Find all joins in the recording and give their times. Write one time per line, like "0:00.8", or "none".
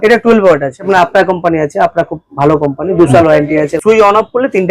0:00.8
0:03.7